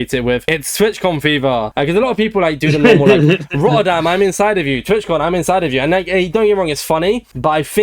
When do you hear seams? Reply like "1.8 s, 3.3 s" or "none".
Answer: none

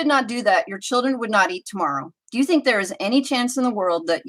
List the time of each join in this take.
none

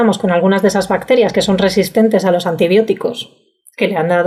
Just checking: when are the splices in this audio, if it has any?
none

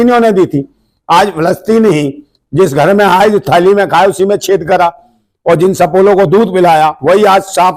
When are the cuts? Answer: none

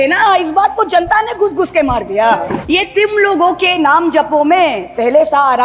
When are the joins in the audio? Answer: 2.6 s

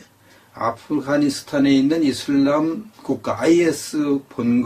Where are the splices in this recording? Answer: 2.6 s

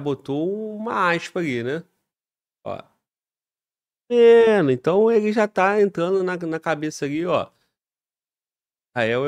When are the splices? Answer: none

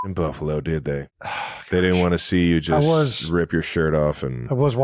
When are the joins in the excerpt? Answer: 1.2 s

